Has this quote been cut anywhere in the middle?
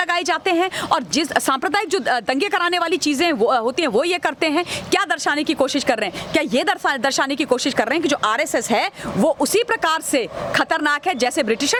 no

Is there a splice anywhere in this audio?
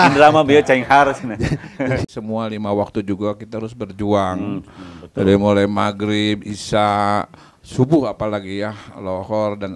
yes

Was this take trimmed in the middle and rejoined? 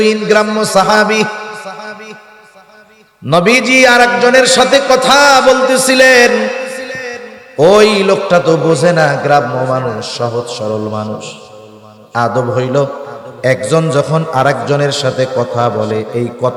no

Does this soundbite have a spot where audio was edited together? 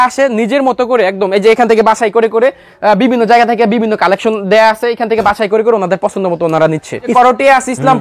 yes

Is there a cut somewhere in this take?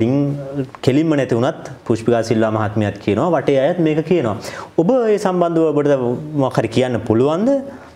no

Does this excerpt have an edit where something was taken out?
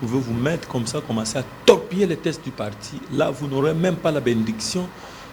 no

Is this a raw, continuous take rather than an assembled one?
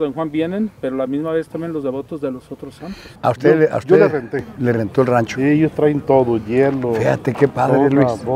no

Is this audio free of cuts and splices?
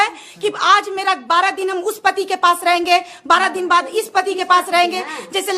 yes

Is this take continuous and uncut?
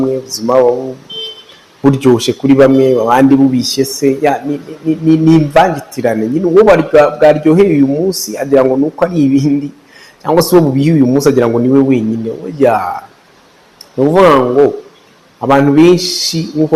yes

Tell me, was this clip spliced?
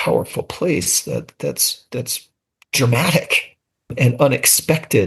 no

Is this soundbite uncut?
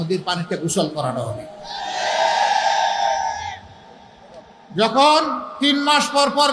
yes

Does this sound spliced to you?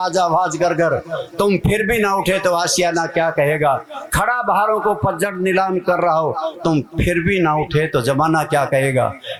no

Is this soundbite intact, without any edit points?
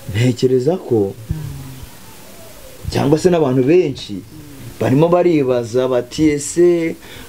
yes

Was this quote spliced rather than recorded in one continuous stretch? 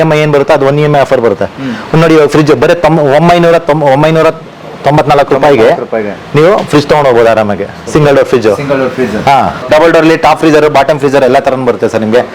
no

